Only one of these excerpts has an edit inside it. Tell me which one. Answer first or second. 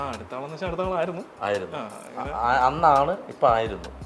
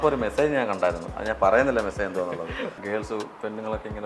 second